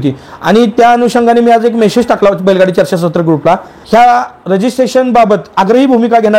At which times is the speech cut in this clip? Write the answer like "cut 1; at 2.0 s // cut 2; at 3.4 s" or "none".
cut 1; at 3.7 s